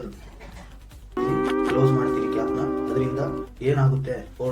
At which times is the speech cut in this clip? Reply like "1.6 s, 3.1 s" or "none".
1.1 s